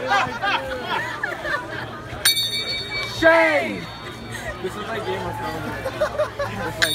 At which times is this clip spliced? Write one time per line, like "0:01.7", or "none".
0:05.6